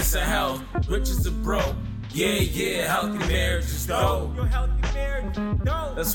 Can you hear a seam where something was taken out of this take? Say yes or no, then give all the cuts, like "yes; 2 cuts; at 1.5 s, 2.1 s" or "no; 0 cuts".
no; 0 cuts